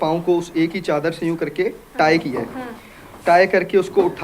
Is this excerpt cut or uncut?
uncut